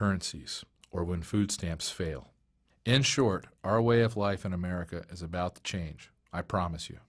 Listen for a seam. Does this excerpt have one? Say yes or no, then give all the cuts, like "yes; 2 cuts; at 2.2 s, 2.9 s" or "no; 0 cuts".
yes; 1 cut; at 1.8 s